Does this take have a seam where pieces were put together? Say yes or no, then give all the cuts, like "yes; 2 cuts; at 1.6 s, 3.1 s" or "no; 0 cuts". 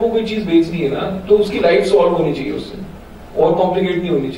no; 0 cuts